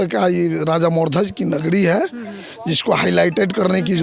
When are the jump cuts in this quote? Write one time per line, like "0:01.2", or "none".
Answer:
none